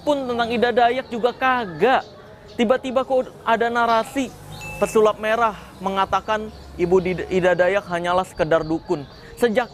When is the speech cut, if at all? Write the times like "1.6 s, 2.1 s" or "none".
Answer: none